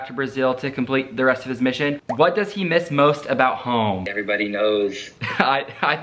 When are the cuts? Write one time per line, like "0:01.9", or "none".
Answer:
0:02.0